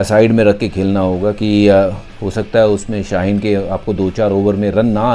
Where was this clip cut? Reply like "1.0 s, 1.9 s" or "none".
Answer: none